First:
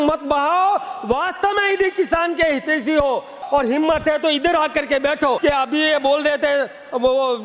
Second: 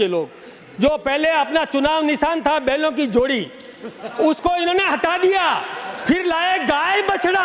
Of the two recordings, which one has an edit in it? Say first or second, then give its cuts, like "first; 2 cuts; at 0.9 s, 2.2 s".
first; 2 cuts; at 3.4 s, 5.4 s